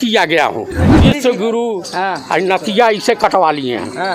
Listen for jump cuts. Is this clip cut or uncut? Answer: cut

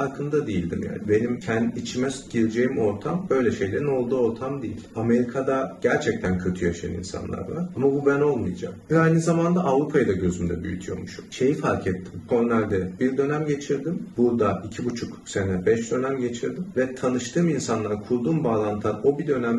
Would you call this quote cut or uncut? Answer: uncut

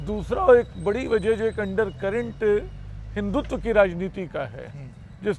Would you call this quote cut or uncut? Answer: uncut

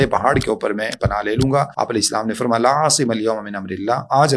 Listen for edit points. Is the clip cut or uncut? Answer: cut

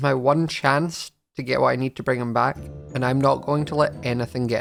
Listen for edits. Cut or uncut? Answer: uncut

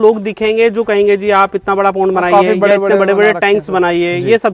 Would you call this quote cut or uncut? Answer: uncut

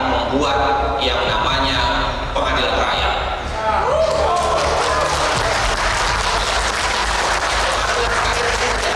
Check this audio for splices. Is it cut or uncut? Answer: uncut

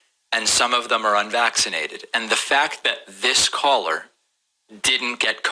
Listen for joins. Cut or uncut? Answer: cut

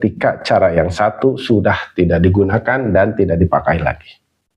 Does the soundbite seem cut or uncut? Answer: uncut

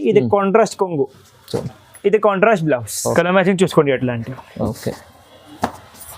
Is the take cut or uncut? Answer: cut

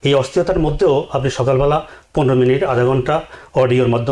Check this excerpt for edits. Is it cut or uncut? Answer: uncut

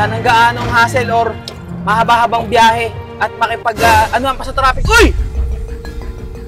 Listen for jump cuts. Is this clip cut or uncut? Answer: cut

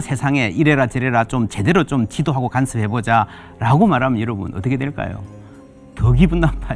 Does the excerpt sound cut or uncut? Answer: uncut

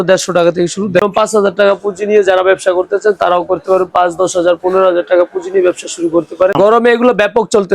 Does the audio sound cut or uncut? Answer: cut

